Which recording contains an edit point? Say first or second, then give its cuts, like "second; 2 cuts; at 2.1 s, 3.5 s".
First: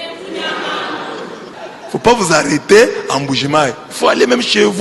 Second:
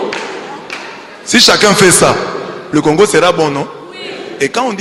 first; 1 cut; at 1.5 s